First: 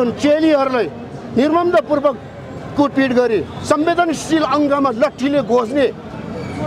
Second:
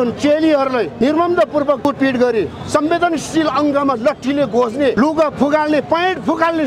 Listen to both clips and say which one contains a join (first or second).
second